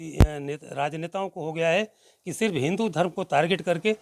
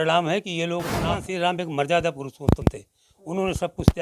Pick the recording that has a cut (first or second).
second